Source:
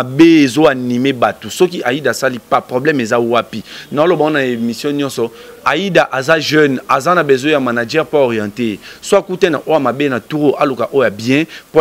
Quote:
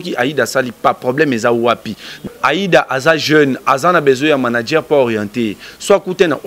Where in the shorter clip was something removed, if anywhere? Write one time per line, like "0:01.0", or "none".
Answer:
0:02.2